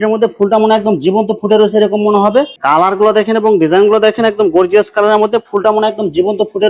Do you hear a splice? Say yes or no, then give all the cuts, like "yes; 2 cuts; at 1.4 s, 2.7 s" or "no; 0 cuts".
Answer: yes; 1 cut; at 2.5 s